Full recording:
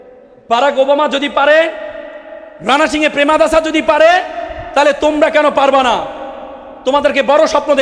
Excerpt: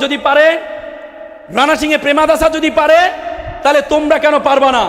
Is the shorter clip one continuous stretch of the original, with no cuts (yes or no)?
yes